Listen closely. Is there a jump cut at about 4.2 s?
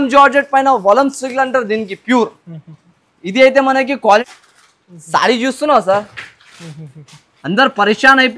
yes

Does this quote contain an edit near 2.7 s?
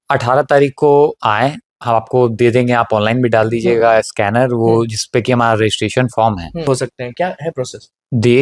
no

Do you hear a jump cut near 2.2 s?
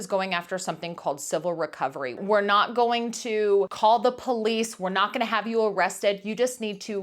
yes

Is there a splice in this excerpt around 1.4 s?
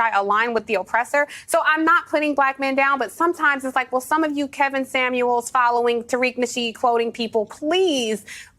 yes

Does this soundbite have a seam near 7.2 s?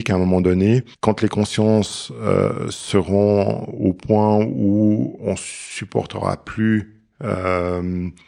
no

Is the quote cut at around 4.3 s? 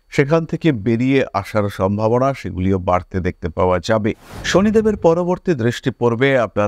yes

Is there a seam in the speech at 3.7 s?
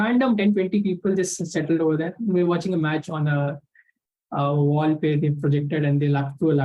no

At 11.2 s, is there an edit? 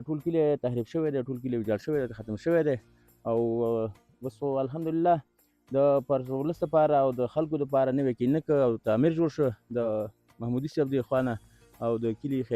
no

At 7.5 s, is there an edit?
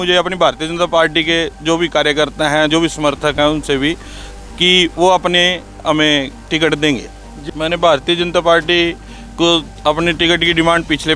yes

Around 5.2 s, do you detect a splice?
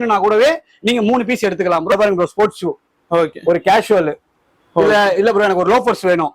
no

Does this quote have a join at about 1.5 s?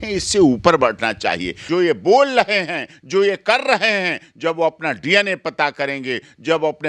yes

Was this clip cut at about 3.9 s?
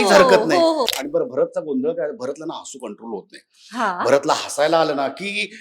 no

